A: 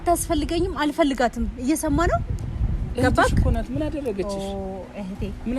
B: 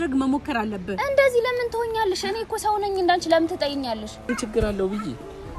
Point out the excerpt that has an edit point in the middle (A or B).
B